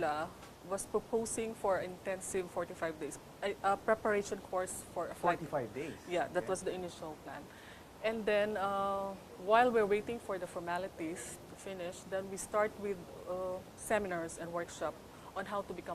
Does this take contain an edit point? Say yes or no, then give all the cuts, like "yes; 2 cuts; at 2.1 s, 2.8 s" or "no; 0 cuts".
yes; 1 cut; at 13.6 s